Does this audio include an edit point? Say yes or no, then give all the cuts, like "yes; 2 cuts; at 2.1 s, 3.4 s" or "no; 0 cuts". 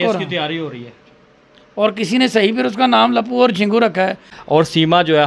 yes; 1 cut; at 4.3 s